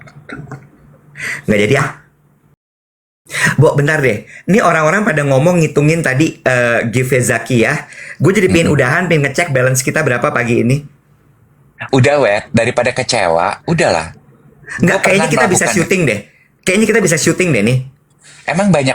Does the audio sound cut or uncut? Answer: cut